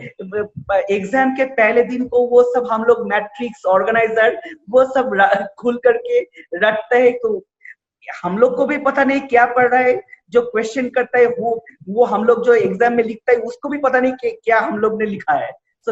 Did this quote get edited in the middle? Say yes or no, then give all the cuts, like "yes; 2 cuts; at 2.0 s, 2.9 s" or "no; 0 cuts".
no; 0 cuts